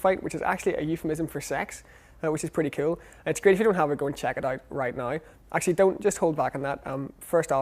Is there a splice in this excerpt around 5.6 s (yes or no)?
yes